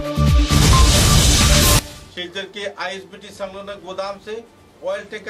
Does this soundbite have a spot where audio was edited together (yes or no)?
yes